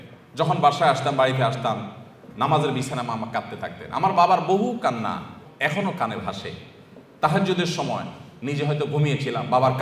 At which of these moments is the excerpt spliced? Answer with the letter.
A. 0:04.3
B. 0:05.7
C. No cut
B